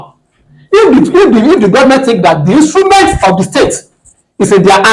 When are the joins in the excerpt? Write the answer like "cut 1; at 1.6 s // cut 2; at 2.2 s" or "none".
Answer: none